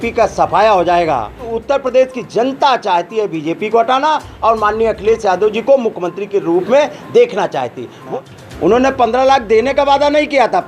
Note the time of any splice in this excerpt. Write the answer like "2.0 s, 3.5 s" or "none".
1.4 s, 8.0 s

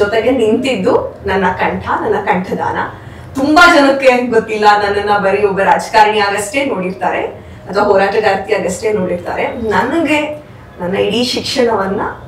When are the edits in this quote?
none

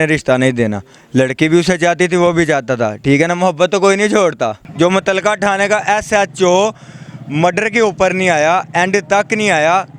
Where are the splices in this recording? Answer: 4.6 s

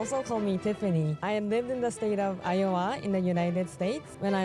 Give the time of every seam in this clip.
none

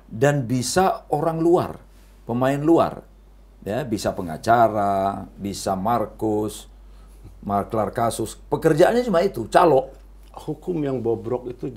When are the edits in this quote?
10.3 s

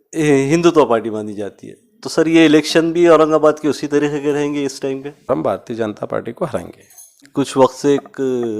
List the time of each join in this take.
5.3 s, 7.2 s

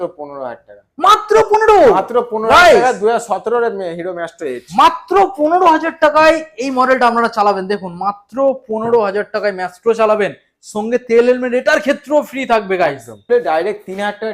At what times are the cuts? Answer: 13.3 s

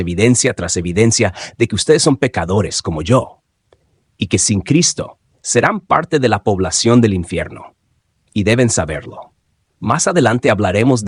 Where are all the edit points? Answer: none

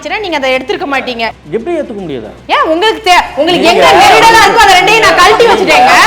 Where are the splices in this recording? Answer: 1.2 s

